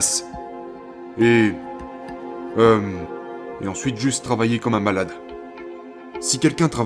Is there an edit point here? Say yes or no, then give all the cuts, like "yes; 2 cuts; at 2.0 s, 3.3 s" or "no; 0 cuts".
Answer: yes; 1 cut; at 5.7 s